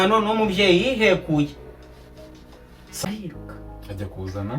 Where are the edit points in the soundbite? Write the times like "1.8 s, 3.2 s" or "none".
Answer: 3.0 s